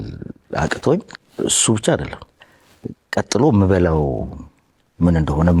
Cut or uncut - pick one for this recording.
cut